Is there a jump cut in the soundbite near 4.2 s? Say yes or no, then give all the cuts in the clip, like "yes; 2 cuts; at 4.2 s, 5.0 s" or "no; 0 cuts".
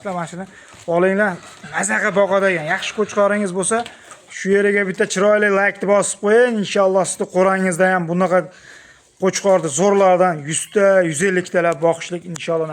yes; 1 cut; at 4.2 s